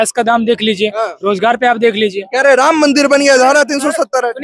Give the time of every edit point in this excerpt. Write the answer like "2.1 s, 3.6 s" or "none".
none